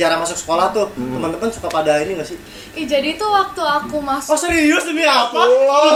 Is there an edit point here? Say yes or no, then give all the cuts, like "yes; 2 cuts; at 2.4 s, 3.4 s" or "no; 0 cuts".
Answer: no; 0 cuts